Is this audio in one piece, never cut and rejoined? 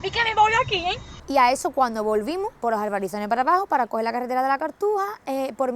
no; 2 cuts; at 1.1 s, 2.6 s

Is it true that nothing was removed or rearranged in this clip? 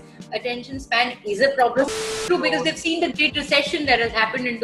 no; 1 cut; at 1.9 s

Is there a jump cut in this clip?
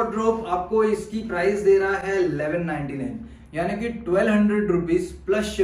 no; 0 cuts

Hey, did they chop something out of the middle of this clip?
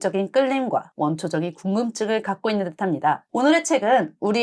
no; 0 cuts

